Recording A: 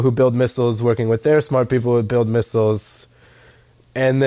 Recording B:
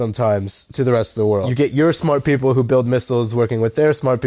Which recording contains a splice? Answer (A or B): B